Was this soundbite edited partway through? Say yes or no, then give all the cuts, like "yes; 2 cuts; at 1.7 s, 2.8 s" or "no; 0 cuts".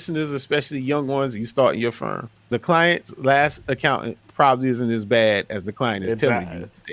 yes; 1 cut; at 2.4 s